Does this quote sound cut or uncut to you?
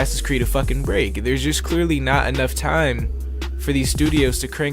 cut